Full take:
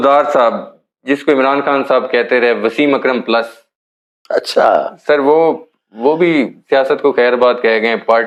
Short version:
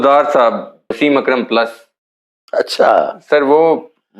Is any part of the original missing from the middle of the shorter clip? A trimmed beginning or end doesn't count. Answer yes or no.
yes